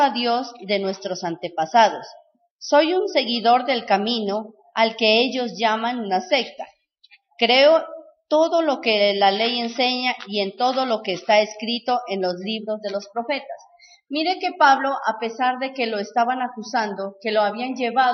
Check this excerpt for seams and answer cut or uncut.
cut